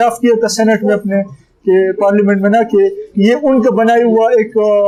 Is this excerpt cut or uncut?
uncut